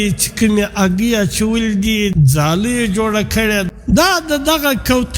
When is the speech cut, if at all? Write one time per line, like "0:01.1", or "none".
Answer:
0:02.1
0:03.7

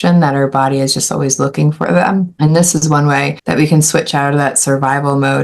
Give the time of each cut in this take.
0:02.3
0:03.4

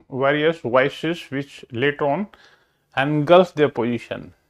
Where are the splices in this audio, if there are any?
none

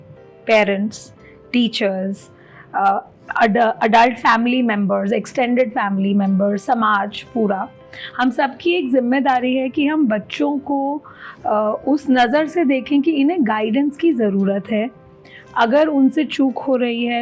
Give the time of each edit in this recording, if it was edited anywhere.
none

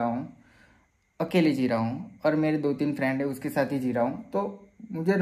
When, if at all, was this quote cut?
none

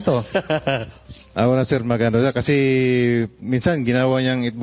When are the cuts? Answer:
none

